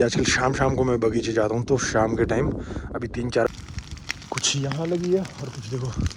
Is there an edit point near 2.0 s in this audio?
no; 1 cut; at 3.5 s

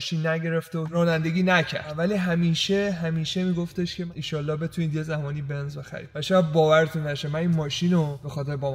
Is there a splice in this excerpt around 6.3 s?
no; 3 cuts; at 0.9 s, 1.9 s, 4.0 s

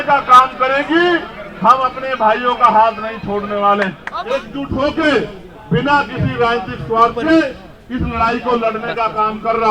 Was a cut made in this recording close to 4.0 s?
yes; 1 cut; at 4.0 s

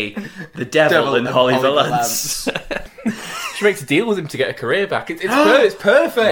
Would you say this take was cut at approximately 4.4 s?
no; 1 cut; at 2.8 s

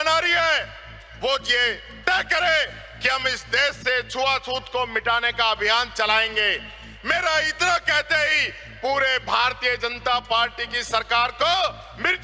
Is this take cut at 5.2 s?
no; 0 cuts

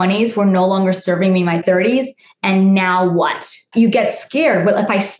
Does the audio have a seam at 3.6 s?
yes; 2 cuts; at 1.6 s, 3.6 s

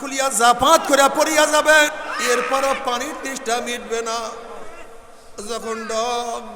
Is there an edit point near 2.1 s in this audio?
yes; 1 cut; at 2.1 s

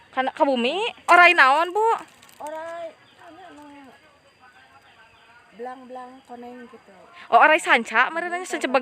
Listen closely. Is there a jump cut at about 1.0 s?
yes; 1 cut; at 1.0 s

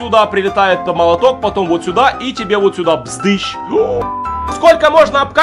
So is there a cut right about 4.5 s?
yes; 1 cut; at 4.5 s

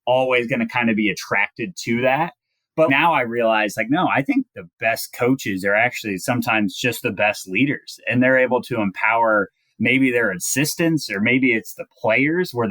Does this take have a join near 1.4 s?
no; 1 cut; at 2.9 s

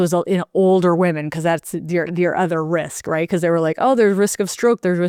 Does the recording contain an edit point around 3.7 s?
no; 0 cuts

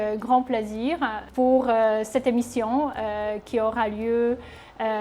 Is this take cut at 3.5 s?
no; 1 cut; at 1.2 s

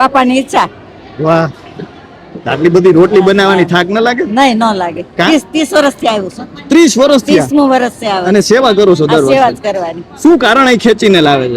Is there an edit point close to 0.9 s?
no; 0 cuts

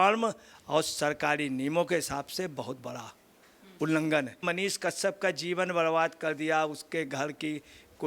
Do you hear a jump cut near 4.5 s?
yes; 1 cut; at 4.5 s

